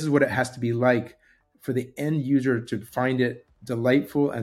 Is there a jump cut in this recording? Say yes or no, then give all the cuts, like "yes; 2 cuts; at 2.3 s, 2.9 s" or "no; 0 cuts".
no; 0 cuts